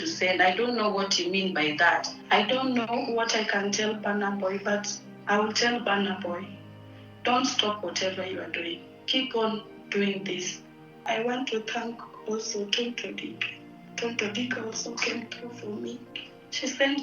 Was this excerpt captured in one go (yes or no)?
no